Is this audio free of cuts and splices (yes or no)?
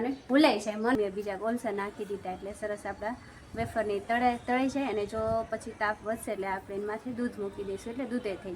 no